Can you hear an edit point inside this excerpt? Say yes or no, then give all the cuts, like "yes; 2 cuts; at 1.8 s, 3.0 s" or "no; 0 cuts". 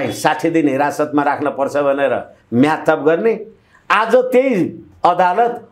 no; 0 cuts